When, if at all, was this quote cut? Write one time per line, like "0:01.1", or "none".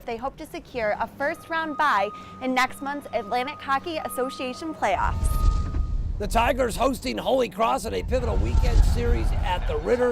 0:06.7